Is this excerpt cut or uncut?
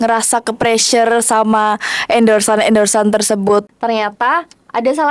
cut